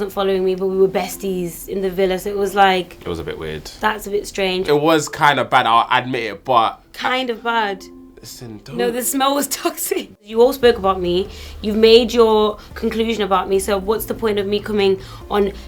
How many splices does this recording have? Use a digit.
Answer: 2